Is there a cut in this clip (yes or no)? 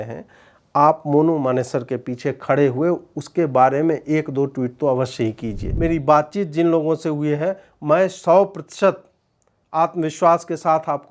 yes